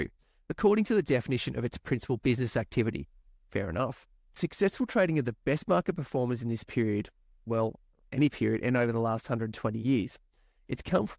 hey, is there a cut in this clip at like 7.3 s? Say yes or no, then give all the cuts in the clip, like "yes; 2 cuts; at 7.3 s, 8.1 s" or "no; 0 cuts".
no; 1 cut; at 4.4 s